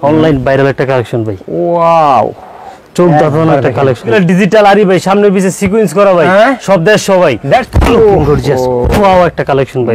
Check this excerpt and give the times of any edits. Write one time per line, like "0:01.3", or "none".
0:04.1
0:07.6